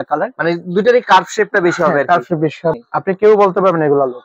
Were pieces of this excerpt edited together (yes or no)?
yes